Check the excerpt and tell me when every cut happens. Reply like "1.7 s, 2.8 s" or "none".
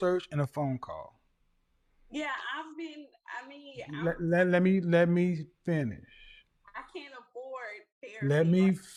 none